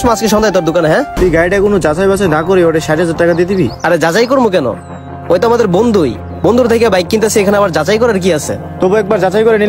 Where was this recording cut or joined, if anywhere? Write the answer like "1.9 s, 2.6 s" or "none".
1.2 s